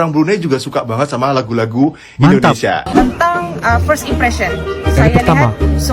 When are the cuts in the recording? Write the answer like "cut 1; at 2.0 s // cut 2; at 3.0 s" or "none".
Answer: cut 1; at 2.9 s